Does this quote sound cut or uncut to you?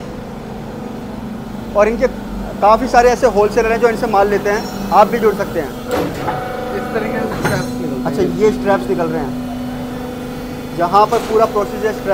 uncut